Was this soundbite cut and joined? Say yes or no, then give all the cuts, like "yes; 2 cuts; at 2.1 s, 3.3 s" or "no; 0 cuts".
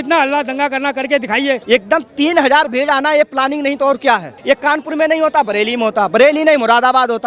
yes; 2 cuts; at 1.6 s, 4.3 s